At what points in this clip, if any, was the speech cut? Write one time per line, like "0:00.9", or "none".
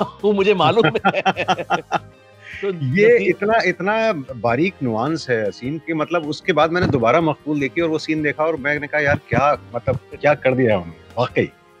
none